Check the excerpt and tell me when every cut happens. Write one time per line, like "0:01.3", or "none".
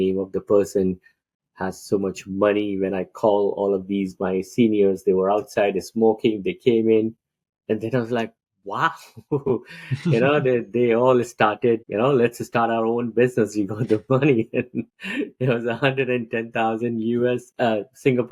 none